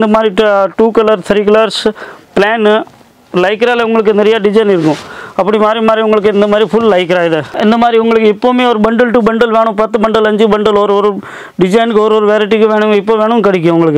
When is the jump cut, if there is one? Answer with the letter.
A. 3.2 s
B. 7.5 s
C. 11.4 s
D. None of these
B